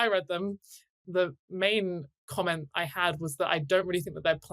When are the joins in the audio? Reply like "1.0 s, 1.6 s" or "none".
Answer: 1.0 s, 2.1 s